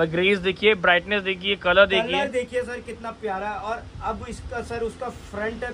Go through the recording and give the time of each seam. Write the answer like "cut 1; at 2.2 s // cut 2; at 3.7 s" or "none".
none